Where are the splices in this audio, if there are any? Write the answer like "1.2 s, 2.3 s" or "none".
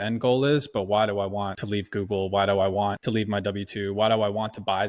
1.6 s, 3.0 s